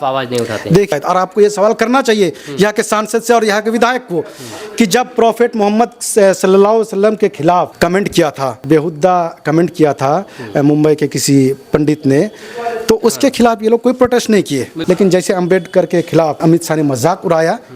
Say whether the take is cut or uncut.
cut